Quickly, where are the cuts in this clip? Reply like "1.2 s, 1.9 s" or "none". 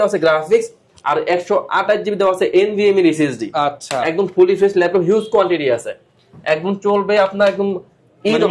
none